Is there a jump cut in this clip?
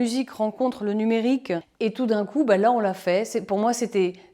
yes; 1 cut; at 1.7 s

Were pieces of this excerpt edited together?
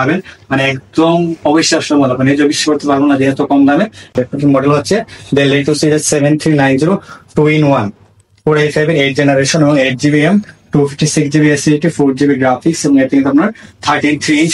no; 0 cuts

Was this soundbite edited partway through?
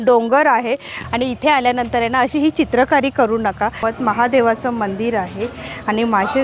yes; 2 cuts; at 0.9 s, 3.8 s

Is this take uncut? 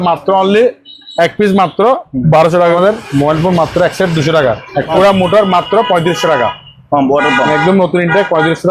no; 2 cuts; at 2.8 s, 4.9 s

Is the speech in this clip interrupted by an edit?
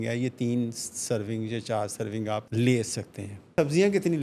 yes; 2 cuts; at 2.5 s, 3.5 s

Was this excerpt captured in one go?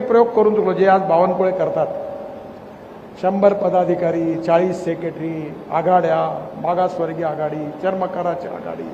yes; 0 cuts

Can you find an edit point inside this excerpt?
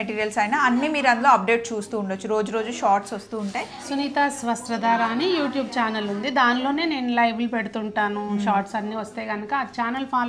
no; 0 cuts

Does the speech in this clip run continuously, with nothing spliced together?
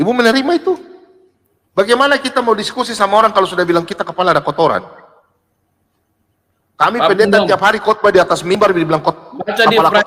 yes; 0 cuts

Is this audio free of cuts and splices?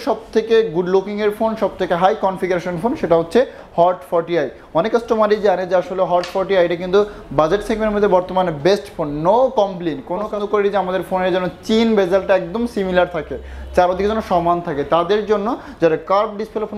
no; 1 cut; at 10.2 s

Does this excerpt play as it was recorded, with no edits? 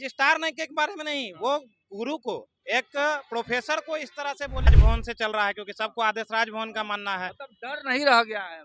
no; 1 cut; at 4.7 s

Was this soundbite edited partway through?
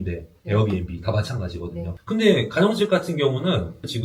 no; 0 cuts

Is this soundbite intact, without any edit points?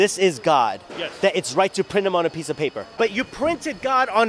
no; 1 cut; at 2.9 s

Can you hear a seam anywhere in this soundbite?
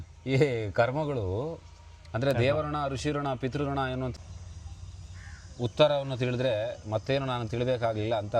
yes; 1 cut; at 4.1 s

